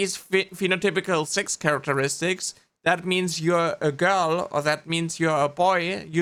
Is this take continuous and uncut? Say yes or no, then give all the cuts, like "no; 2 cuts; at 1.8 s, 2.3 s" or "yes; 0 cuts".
yes; 0 cuts